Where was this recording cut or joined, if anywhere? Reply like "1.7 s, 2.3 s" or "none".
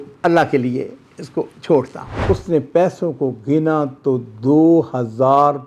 2.1 s